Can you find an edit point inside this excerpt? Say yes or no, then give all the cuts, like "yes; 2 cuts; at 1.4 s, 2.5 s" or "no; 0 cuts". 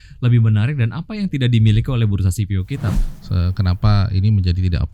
yes; 1 cut; at 2.9 s